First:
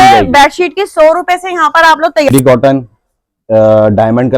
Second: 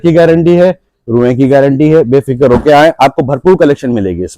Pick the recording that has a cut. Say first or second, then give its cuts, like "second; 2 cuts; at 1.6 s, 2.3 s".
first; 1 cut; at 2.3 s